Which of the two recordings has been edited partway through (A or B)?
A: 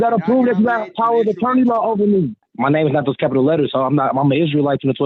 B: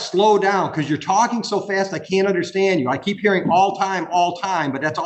A